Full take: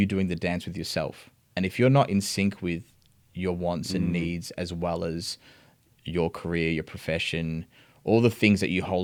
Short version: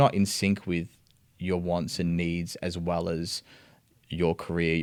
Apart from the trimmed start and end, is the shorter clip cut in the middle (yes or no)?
no